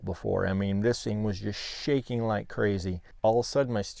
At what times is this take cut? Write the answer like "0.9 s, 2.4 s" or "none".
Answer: 3.0 s